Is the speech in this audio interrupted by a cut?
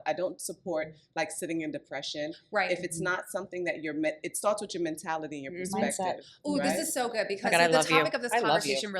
no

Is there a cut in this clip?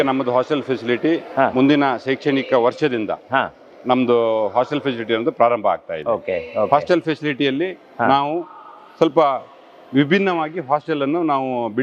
no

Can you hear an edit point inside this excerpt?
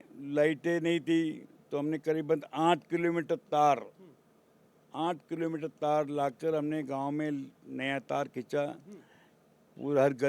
no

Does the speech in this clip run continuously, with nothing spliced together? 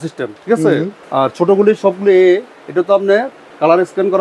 yes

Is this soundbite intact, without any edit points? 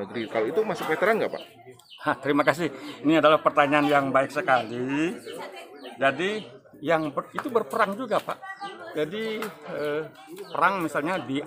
yes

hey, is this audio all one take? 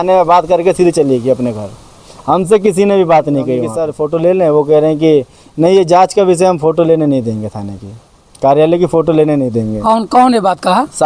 no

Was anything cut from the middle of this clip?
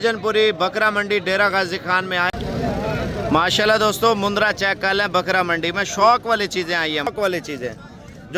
yes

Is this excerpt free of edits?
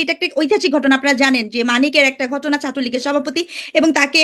yes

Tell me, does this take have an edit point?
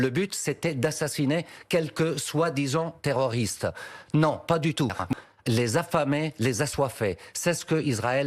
yes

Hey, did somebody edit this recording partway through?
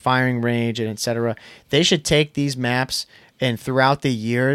no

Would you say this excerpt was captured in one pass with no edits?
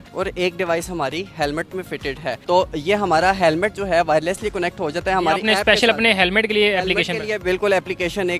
yes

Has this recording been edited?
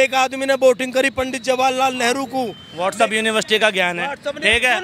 yes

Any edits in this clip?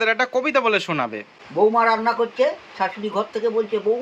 no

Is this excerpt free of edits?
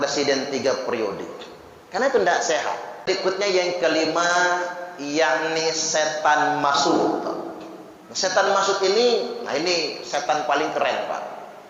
no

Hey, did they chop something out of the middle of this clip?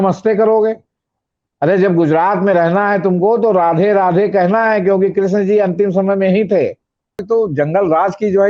yes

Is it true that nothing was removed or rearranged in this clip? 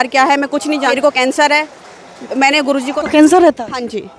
no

